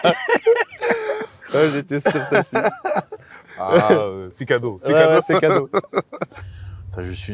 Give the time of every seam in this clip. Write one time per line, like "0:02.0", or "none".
0:06.3